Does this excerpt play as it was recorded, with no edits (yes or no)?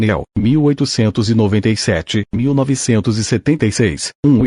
yes